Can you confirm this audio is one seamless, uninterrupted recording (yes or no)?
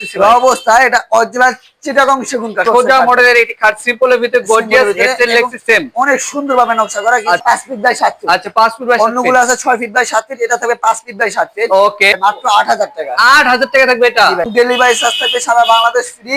no